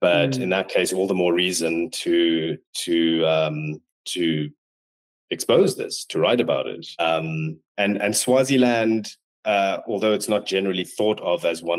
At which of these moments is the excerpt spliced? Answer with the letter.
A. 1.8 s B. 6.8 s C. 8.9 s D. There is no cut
B